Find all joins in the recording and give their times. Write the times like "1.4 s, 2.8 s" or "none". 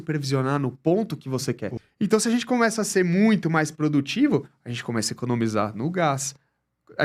1.7 s